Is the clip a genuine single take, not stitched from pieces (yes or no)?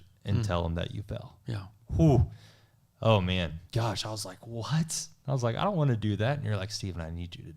no